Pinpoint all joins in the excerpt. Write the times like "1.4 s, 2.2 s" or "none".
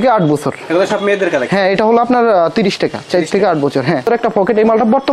4.1 s

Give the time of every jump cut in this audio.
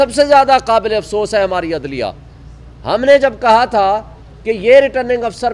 none

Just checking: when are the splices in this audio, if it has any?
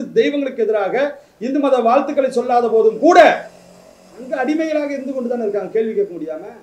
none

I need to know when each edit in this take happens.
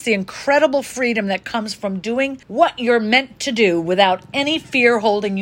none

